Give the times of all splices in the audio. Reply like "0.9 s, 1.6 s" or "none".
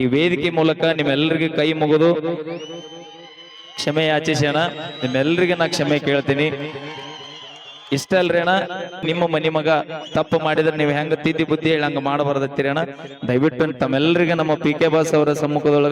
9.0 s